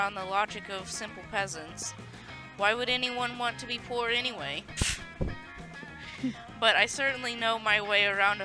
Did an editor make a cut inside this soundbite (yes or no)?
no